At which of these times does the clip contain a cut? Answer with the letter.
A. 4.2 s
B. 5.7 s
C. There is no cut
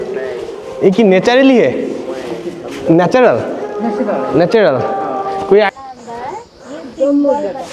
B